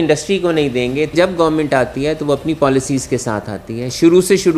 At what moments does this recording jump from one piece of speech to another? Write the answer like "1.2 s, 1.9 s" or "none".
1.1 s